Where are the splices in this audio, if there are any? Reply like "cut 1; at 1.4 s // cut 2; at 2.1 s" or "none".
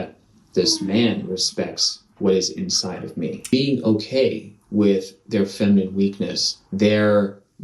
cut 1; at 3.5 s